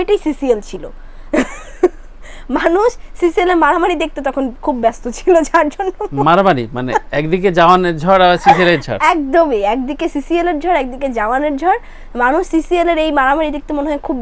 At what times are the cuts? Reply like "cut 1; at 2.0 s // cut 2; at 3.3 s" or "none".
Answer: none